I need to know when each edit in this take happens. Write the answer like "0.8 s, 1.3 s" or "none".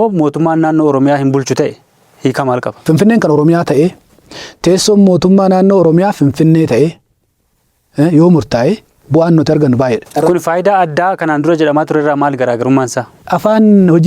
2.8 s, 10.1 s, 13.2 s